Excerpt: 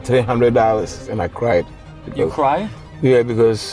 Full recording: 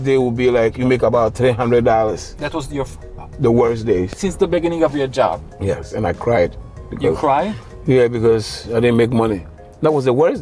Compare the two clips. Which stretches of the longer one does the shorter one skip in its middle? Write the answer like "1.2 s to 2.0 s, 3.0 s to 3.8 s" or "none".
2.3 s to 5.9 s